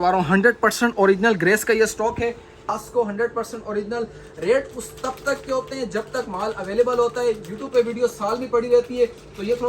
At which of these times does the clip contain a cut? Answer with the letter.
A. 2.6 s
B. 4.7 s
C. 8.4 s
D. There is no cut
A